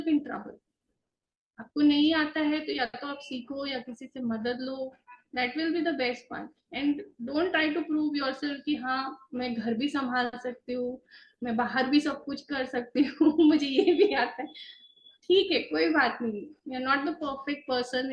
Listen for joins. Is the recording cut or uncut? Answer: uncut